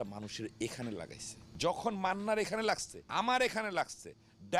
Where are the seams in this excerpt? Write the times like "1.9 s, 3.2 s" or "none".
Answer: 1.4 s, 3.0 s